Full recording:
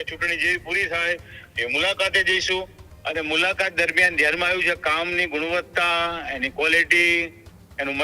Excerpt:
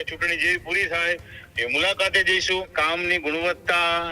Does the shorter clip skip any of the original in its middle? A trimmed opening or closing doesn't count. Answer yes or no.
yes